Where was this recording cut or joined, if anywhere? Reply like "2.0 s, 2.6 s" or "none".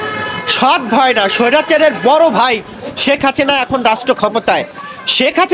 none